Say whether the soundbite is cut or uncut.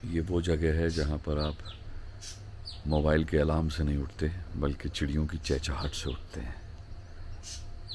uncut